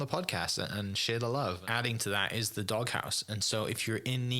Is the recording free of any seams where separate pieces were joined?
no; 1 cut; at 1.6 s

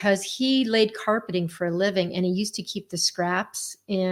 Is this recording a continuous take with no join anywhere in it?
yes; 0 cuts

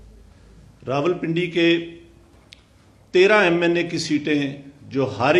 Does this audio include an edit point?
no; 0 cuts

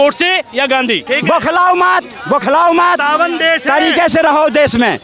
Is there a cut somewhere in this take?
yes; 1 cut; at 1.1 s

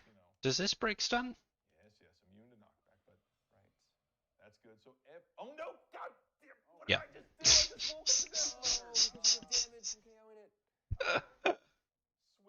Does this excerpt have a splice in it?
no; 0 cuts

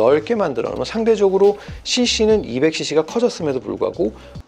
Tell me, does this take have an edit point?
no; 0 cuts

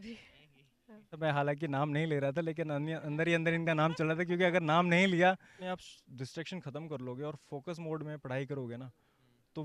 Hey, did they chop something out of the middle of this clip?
yes; 2 cuts; at 1.2 s, 5.5 s

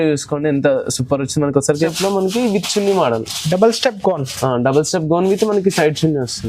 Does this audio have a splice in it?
yes; 1 cut; at 1.9 s

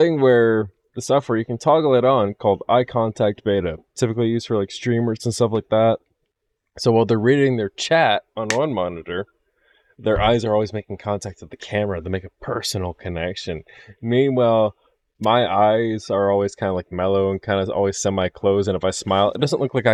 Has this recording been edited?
no; 0 cuts

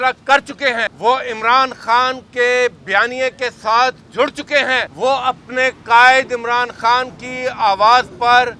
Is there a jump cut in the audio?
yes; 2 cuts; at 0.9 s, 4.9 s

